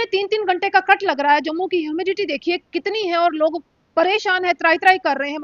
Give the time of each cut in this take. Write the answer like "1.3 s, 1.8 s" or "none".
none